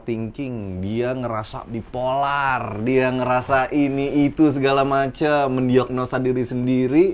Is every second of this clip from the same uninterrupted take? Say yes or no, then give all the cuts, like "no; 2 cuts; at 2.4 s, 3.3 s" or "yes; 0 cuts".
yes; 0 cuts